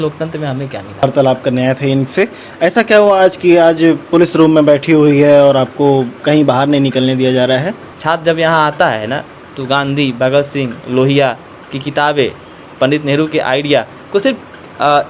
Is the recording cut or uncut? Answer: cut